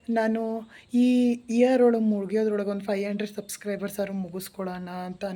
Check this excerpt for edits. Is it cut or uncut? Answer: uncut